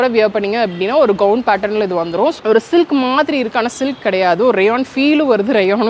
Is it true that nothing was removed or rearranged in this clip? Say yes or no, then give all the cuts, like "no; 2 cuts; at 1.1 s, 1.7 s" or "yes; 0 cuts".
no; 1 cut; at 2.4 s